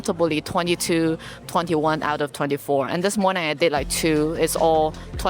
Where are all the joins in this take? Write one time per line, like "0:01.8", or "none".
none